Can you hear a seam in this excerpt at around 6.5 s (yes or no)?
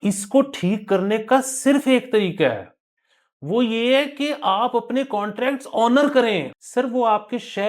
yes